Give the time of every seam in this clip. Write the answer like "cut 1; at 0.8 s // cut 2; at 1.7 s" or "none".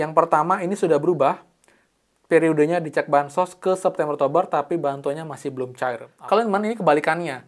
cut 1; at 6.1 s